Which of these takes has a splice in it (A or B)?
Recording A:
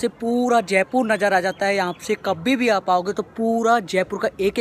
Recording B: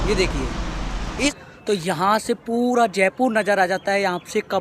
B